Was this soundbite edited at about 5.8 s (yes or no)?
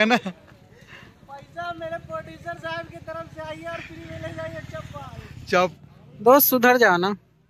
yes